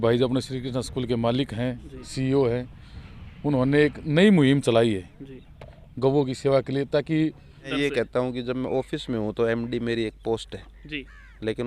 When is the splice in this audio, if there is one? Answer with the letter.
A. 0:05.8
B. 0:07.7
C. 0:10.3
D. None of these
B